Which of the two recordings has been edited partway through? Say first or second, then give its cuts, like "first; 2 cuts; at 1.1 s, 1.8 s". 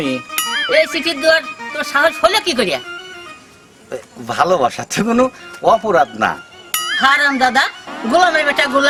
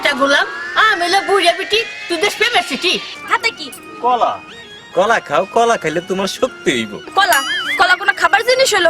second; 1 cut; at 3.1 s